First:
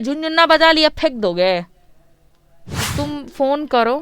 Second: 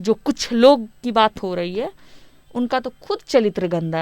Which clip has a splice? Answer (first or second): first